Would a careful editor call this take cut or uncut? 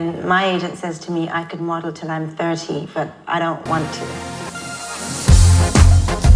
cut